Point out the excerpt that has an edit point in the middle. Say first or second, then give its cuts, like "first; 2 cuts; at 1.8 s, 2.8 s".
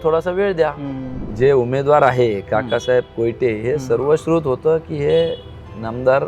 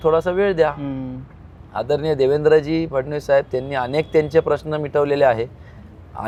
first; 1 cut; at 1.2 s